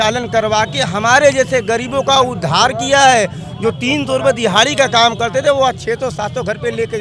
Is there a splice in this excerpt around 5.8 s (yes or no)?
no